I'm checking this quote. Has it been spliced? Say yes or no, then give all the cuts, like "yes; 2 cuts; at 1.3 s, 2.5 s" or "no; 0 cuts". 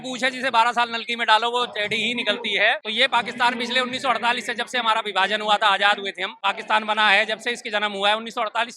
yes; 2 cuts; at 2.9 s, 6.3 s